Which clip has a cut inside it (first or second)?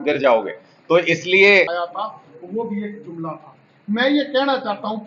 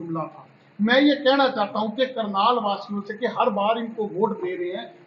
first